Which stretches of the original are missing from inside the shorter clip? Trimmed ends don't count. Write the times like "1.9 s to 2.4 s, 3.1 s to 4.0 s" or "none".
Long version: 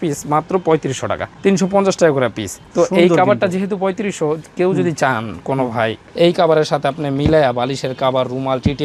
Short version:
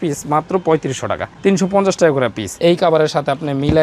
2.5 s to 6.0 s